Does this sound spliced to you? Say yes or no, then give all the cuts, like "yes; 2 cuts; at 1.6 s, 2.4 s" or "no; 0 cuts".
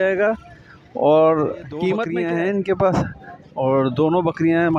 yes; 1 cut; at 2.1 s